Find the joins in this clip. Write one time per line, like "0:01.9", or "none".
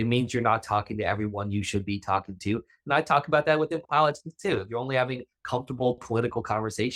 none